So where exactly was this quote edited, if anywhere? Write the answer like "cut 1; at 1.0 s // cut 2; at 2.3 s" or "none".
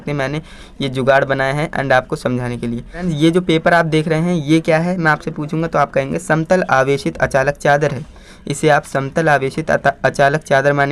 none